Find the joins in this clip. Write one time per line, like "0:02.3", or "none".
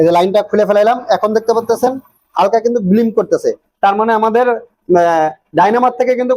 none